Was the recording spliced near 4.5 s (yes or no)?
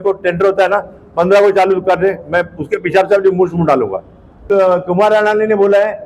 yes